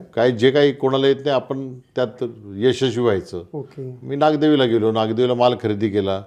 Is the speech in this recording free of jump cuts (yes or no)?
yes